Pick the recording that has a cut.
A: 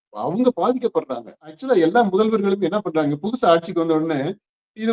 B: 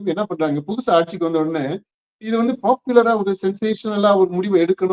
A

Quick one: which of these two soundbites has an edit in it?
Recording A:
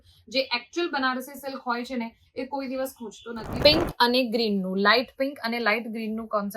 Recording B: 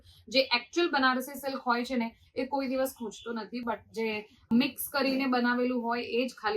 A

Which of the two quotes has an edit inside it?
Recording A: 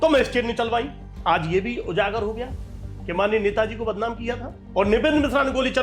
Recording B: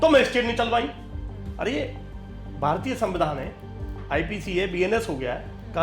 A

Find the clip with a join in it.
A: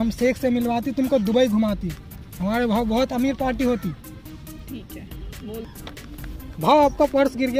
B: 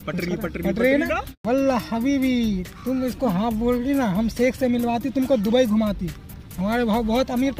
B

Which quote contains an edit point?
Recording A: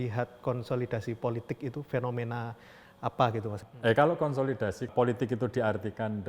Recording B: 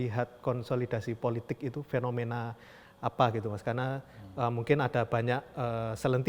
A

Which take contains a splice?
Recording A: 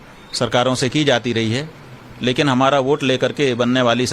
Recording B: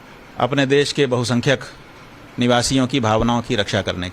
B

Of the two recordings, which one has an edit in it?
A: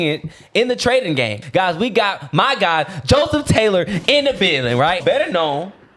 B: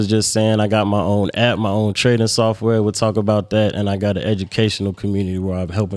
A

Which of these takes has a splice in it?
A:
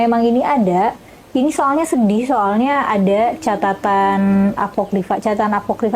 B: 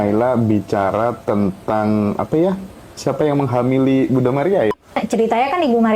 B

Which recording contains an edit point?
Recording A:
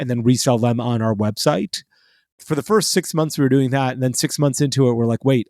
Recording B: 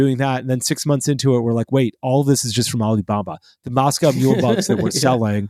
A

